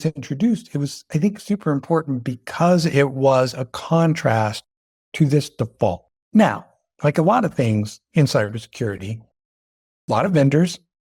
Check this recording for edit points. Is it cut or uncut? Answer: uncut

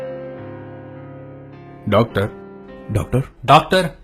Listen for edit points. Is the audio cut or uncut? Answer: cut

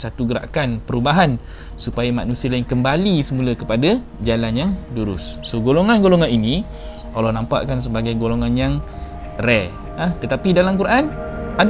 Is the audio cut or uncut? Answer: cut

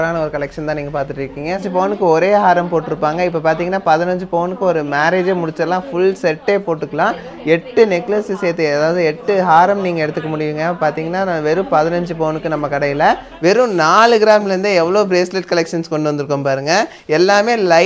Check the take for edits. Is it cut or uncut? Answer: cut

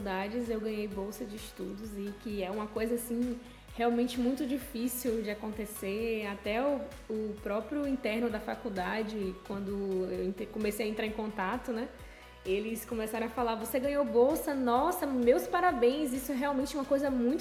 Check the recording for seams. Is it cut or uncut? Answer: uncut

